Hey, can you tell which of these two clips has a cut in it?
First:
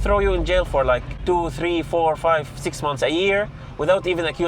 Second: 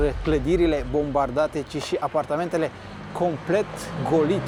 first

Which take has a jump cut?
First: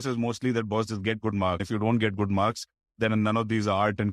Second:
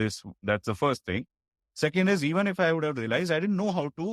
first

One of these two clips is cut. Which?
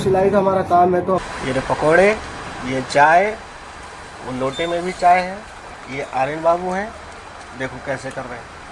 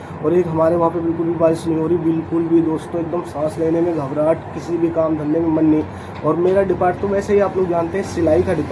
first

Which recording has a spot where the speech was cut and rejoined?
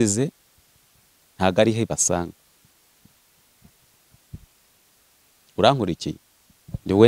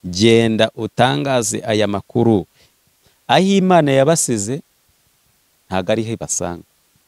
second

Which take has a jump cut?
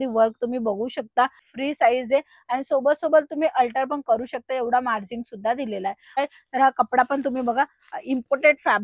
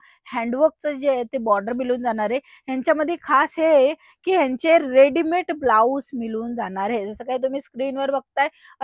first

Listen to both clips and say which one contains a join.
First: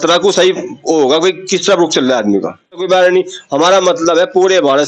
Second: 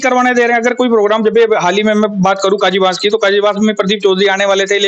first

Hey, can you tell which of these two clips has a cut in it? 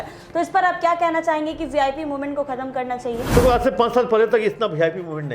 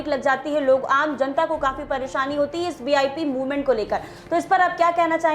first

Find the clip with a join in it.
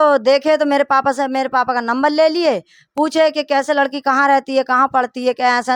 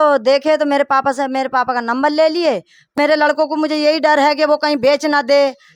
second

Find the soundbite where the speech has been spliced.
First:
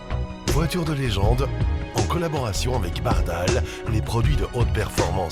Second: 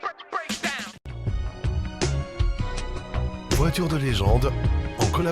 second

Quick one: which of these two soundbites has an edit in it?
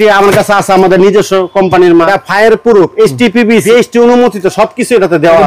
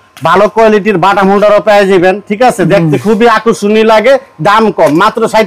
first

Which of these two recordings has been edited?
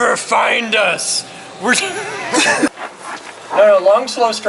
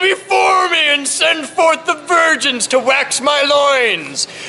first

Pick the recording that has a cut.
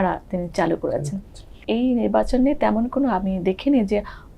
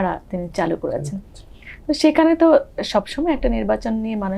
first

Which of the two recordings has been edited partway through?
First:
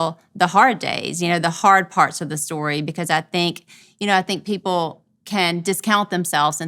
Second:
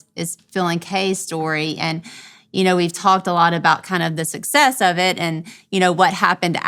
first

